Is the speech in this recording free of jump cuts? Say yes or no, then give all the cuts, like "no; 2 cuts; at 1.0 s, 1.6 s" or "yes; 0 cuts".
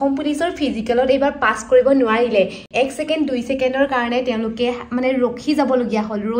yes; 0 cuts